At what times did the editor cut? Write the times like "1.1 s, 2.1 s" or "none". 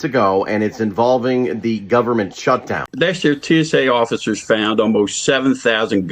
2.9 s